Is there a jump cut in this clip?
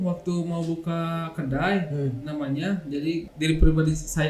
yes; 1 cut; at 3.3 s

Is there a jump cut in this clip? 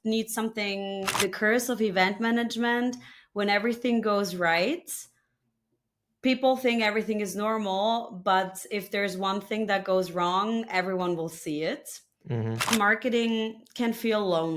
yes; 2 cuts; at 1.2 s, 12.7 s

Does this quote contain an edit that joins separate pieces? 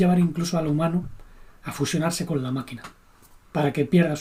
no; 0 cuts

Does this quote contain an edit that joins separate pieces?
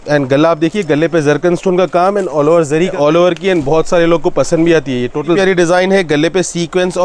yes; 2 cuts; at 2.9 s, 5.4 s

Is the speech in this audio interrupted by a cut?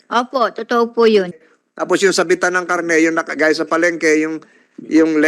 yes; 1 cut; at 1.4 s

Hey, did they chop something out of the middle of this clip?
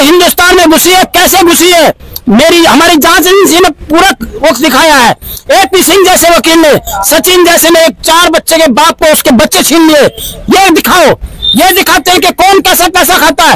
no; 0 cuts

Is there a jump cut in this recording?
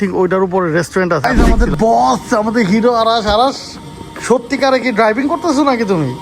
yes; 1 cut; at 1.2 s

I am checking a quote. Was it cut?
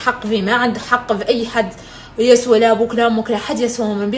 no; 0 cuts

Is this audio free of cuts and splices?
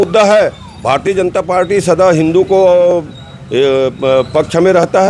yes; 0 cuts

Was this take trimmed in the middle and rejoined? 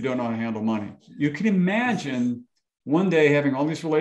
yes; 1 cut; at 1.0 s

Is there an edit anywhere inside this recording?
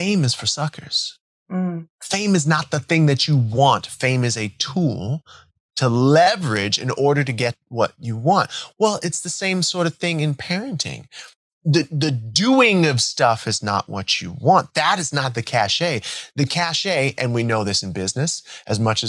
no; 0 cuts

